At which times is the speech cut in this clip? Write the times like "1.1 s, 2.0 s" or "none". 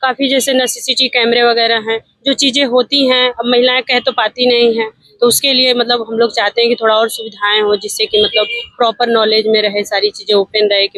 none